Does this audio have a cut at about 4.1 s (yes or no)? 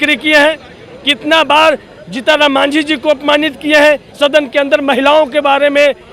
yes